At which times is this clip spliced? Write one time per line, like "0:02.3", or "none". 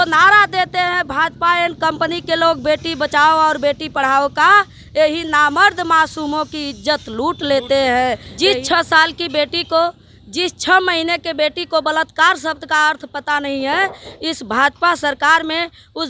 0:08.3